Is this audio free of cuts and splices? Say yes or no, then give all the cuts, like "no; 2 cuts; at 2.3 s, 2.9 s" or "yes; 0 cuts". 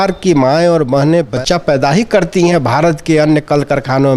no; 1 cut; at 1.3 s